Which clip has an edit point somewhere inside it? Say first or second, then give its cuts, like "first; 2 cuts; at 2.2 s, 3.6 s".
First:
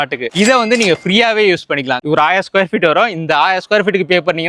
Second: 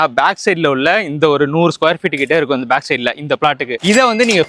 first; 1 cut; at 2.0 s